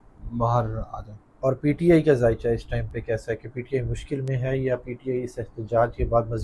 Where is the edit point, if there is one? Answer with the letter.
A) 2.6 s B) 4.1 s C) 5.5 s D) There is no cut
D